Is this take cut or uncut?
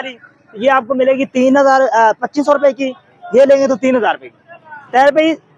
uncut